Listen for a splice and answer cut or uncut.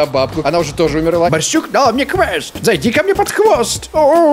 cut